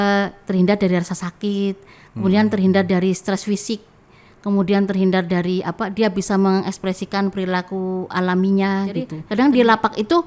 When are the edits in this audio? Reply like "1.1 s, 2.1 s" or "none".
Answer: 9.2 s